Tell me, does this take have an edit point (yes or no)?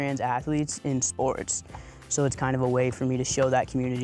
no